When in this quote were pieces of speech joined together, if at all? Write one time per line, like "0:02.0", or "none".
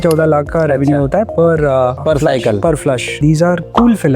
0:03.2